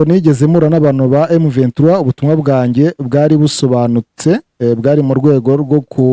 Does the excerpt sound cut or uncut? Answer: uncut